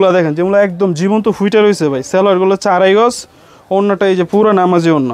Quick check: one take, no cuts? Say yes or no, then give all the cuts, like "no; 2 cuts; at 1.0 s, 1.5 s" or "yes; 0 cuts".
yes; 0 cuts